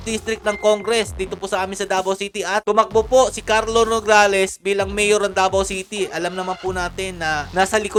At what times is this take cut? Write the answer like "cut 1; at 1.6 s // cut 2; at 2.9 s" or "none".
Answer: none

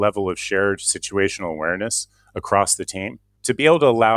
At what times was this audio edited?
none

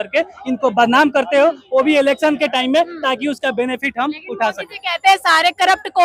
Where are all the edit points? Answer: none

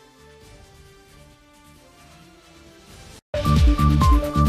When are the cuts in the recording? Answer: none

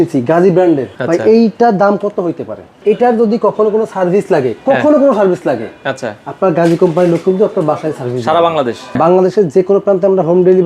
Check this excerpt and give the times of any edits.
cut 1; at 0.9 s // cut 2; at 2.8 s // cut 3; at 9.0 s

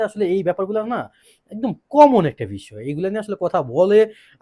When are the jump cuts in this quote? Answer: none

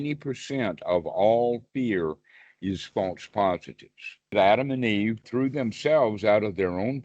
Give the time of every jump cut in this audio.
cut 1; at 4.3 s // cut 2; at 5.3 s

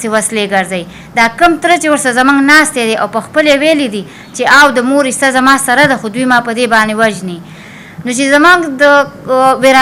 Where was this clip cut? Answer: none

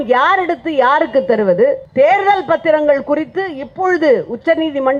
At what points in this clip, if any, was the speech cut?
cut 1; at 1.8 s

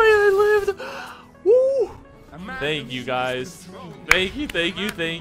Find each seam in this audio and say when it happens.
none

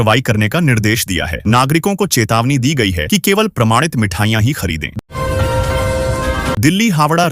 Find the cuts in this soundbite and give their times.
cut 1; at 5.0 s // cut 2; at 6.6 s

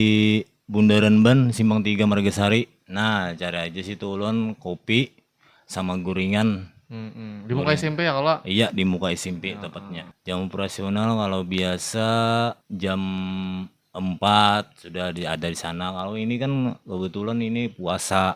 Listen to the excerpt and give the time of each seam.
cut 1; at 10.1 s // cut 2; at 12.6 s

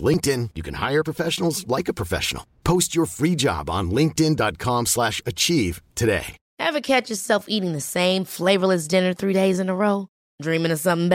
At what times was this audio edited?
none

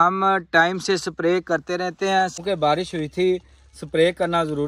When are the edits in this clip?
cut 1; at 2.4 s

